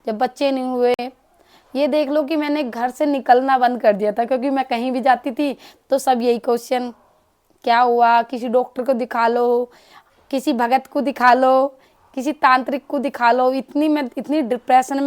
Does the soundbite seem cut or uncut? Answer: uncut